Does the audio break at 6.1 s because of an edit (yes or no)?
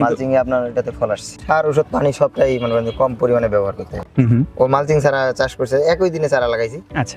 no